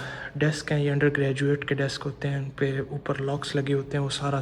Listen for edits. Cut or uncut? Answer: uncut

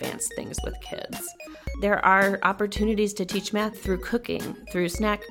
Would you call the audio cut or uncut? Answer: cut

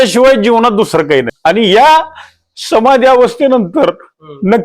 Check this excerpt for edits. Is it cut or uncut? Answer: cut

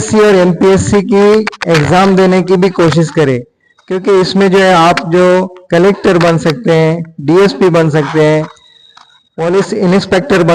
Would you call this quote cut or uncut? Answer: uncut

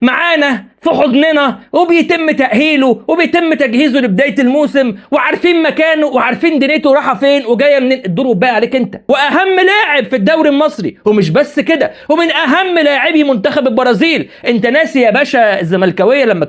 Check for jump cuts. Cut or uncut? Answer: cut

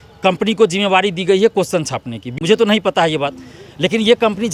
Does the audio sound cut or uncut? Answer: uncut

